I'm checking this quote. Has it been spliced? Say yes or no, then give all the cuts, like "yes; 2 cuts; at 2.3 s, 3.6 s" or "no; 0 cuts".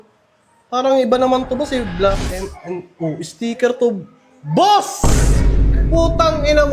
no; 0 cuts